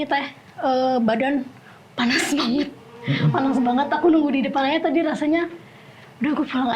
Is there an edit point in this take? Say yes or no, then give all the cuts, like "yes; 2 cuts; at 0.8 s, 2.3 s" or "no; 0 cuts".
no; 0 cuts